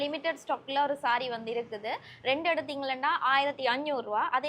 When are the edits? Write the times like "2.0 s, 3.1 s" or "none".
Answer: none

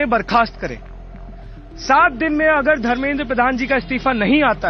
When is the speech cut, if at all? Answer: none

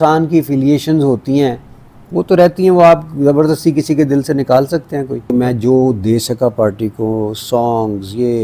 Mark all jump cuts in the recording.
5.3 s

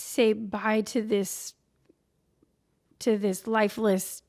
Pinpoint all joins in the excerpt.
none

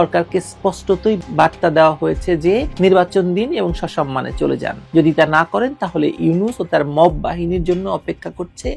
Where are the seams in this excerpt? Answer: none

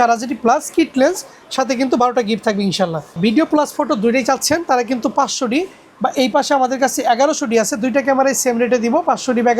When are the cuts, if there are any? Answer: 3.2 s

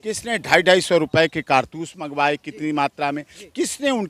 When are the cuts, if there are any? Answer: none

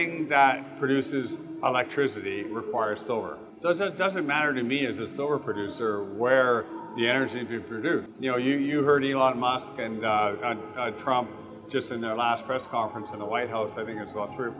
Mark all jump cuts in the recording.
3.4 s, 8.1 s

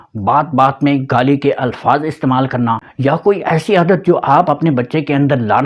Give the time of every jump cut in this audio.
2.9 s

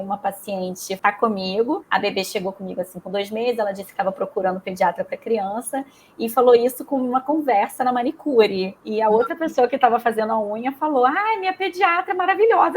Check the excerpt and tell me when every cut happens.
0.9 s, 1.8 s

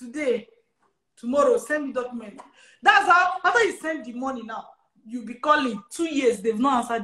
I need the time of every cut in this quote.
none

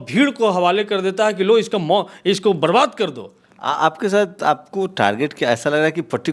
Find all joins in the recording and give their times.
none

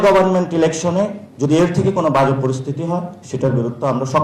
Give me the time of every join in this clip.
none

